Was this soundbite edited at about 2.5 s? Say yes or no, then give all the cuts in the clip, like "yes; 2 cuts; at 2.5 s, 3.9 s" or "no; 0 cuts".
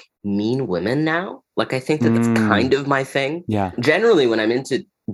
yes; 2 cuts; at 2.5 s, 3.8 s